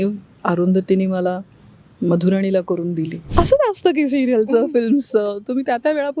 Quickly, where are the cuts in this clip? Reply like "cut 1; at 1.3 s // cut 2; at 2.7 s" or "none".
cut 1; at 3.2 s